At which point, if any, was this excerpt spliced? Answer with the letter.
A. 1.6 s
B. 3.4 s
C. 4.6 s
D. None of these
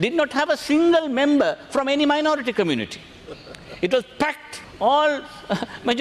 C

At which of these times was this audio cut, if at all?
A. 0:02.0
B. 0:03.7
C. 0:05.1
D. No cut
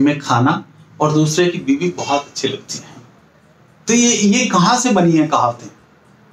D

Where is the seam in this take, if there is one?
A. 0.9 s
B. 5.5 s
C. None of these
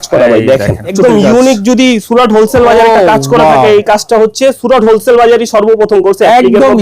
A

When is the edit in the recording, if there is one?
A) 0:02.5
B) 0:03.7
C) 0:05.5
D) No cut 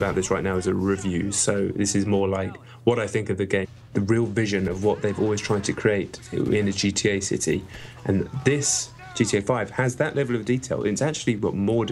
D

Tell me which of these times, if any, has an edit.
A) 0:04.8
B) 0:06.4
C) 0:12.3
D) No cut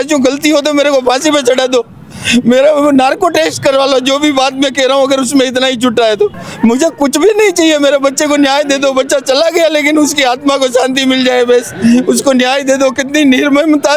B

